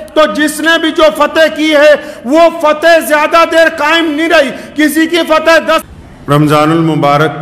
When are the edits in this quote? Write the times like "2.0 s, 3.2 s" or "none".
5.9 s

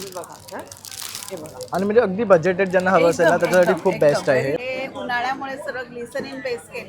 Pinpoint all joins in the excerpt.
4.6 s

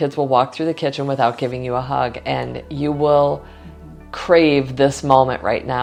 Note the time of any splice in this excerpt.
none

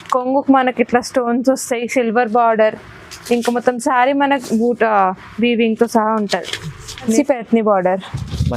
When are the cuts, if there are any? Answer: 7.2 s

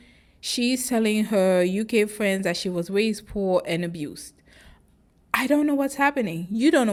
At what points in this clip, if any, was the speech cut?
none

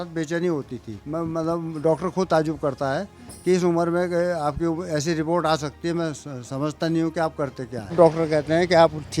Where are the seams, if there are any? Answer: 1.0 s, 7.9 s

